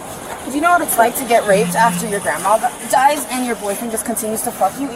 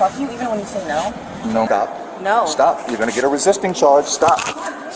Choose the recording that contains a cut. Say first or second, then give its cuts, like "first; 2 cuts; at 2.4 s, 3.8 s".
second; 1 cut; at 1.7 s